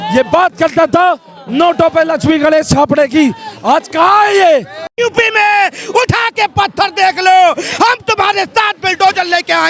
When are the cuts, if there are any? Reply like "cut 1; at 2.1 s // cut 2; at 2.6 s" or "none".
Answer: cut 1; at 4.8 s